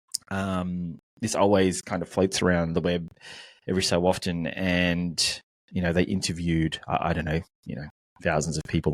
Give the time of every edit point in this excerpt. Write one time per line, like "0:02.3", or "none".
none